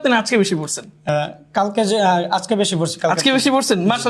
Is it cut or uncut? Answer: cut